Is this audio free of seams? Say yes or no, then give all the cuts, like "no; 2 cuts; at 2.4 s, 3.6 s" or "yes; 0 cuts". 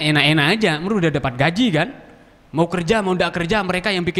yes; 0 cuts